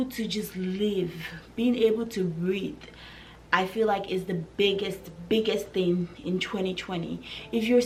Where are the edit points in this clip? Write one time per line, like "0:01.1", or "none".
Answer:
none